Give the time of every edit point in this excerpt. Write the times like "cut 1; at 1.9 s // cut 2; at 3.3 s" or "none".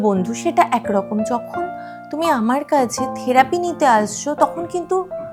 none